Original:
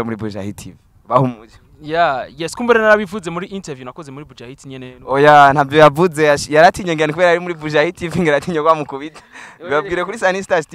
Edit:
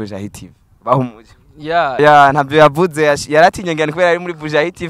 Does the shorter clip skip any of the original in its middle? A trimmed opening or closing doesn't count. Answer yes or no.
yes